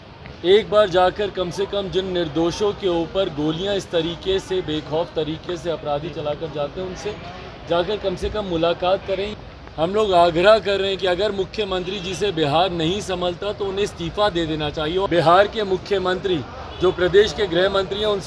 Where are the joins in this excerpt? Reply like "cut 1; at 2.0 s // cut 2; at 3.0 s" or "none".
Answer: cut 1; at 9.3 s // cut 2; at 15.1 s